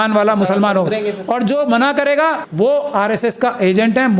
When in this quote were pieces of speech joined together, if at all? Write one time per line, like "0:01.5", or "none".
0:02.4